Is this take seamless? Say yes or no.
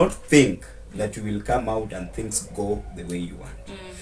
yes